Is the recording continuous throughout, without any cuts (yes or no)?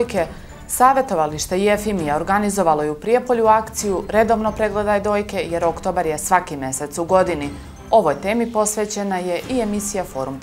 yes